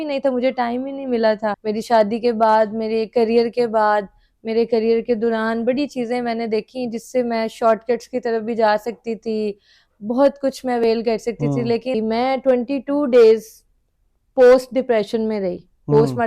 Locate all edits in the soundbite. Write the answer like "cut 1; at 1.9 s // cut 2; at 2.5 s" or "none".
cut 1; at 1.6 s // cut 2; at 11.9 s